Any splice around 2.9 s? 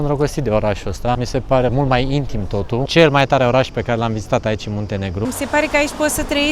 yes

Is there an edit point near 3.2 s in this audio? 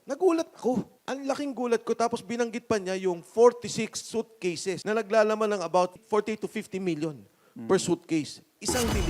no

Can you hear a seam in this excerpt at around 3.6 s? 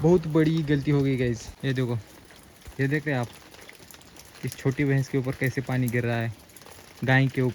no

